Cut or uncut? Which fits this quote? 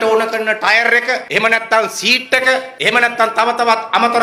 uncut